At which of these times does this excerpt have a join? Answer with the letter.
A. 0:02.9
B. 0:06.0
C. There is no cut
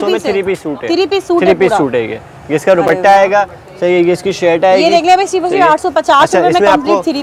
C